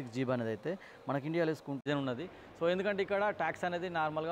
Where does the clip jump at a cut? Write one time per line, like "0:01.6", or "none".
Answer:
0:01.9